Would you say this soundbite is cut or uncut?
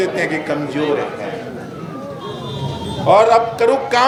uncut